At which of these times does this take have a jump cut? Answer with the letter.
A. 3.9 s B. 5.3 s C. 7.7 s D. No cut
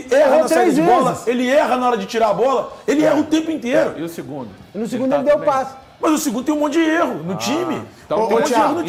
D